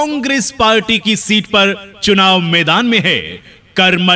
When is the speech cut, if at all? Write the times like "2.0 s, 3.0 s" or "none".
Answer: none